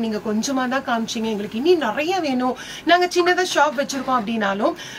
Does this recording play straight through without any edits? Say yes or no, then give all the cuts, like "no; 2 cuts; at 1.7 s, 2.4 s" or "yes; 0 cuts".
yes; 0 cuts